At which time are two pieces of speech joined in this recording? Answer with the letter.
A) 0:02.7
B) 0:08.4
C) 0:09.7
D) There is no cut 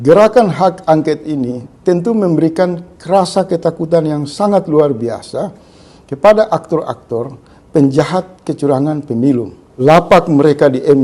C